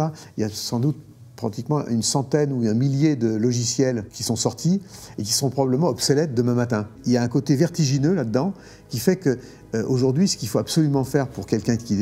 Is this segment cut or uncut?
cut